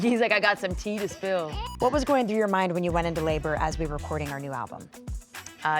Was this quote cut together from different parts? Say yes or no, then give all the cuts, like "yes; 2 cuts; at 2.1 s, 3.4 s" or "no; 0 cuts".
yes; 1 cut; at 1.6 s